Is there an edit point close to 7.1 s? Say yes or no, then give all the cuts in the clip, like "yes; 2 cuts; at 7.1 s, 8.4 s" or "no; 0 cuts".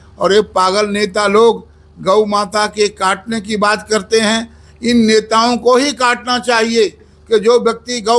yes; 1 cut; at 7.1 s